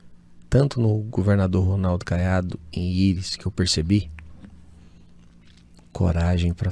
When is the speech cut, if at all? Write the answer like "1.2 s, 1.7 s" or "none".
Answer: none